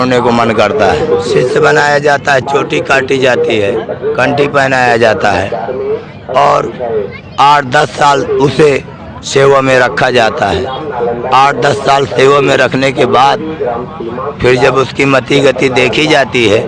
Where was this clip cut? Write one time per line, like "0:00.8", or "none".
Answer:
0:01.0